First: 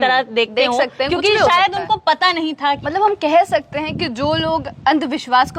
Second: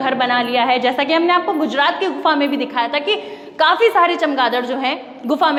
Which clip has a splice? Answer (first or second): first